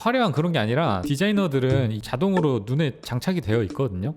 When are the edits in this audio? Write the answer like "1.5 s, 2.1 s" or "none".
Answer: 1.1 s, 2.0 s